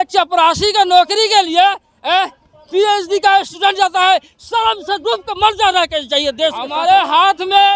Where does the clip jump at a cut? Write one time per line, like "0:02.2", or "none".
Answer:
0:06.8